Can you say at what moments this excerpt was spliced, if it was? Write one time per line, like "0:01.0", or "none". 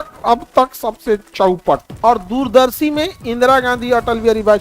0:01.9